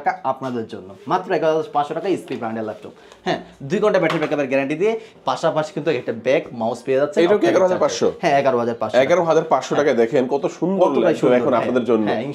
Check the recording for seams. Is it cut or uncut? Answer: uncut